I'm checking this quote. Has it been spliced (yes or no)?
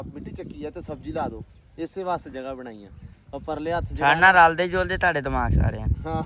no